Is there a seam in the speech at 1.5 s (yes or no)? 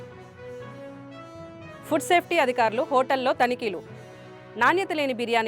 yes